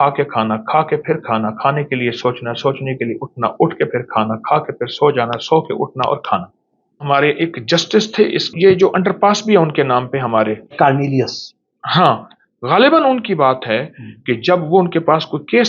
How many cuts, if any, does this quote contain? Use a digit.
3